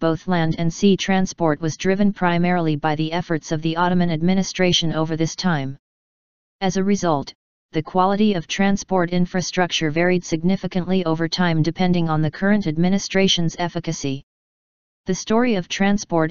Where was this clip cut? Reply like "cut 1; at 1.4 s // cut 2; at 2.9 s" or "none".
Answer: cut 1; at 2.6 s